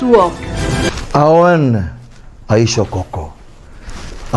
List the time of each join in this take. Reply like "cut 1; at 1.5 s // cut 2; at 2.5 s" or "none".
none

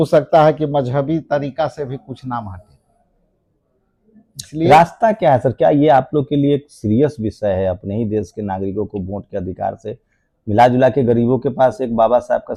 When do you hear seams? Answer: none

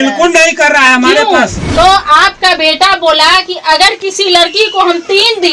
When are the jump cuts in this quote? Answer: cut 1; at 1.6 s

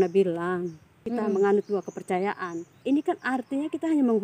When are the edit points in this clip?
cut 1; at 1.0 s // cut 2; at 2.7 s

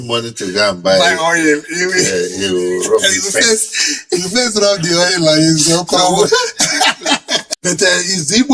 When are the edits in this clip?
cut 1; at 7.4 s

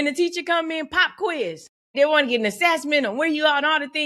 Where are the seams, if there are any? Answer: cut 1; at 1.9 s

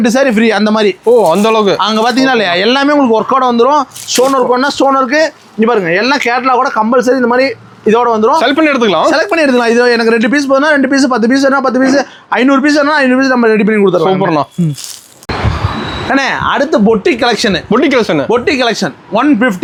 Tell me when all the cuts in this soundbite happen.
none

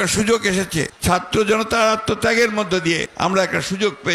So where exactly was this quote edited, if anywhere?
cut 1; at 0.9 s // cut 2; at 3.1 s

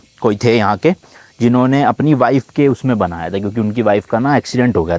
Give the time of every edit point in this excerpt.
none

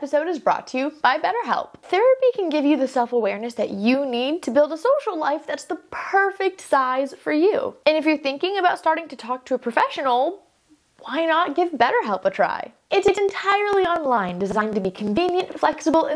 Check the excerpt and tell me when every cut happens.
cut 1; at 1.8 s // cut 2; at 7.7 s

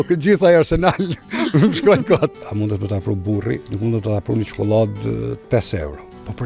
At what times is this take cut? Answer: cut 1; at 2.5 s // cut 2; at 3.6 s

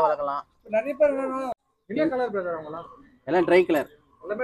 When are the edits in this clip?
cut 1; at 1.6 s

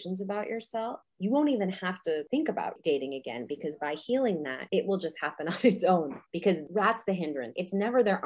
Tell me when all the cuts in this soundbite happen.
cut 1; at 1.1 s // cut 2; at 2.5 s // cut 3; at 4.6 s // cut 4; at 6.4 s // cut 5; at 7.5 s

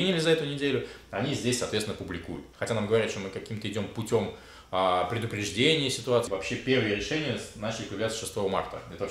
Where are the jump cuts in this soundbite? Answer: cut 1; at 2.5 s // cut 2; at 6.3 s

